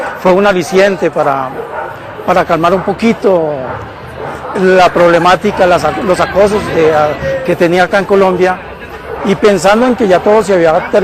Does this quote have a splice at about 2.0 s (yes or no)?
yes